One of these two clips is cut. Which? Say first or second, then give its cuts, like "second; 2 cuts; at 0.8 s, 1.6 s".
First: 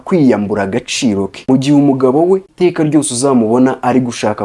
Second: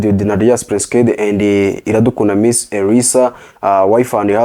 first; 2 cuts; at 1.3 s, 2.5 s